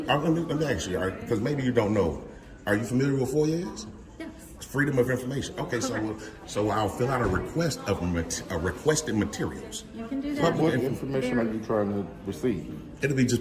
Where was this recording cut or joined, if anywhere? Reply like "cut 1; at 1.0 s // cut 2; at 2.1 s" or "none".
none